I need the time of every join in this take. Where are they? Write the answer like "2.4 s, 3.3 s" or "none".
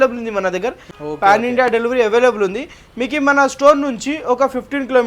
0.9 s